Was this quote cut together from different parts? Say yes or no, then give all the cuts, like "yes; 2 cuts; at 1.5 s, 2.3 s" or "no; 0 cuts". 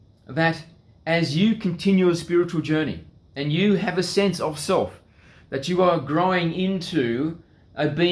no; 0 cuts